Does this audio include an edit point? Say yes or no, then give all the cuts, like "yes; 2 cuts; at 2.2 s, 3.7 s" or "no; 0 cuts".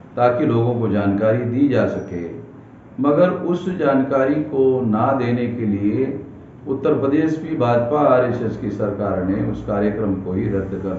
no; 0 cuts